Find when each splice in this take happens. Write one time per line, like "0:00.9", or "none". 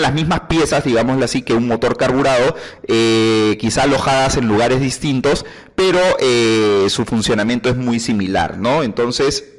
0:03.5